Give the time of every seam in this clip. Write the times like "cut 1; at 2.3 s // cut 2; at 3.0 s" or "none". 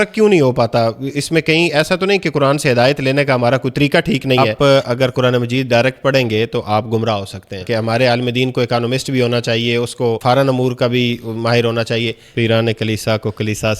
cut 1; at 4.5 s // cut 2; at 7.6 s // cut 3; at 10.2 s // cut 4; at 12.2 s